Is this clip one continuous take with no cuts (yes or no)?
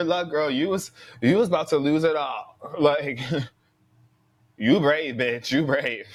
yes